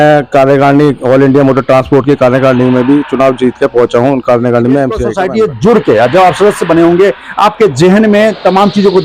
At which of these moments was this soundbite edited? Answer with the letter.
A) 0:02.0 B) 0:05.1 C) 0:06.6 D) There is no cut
B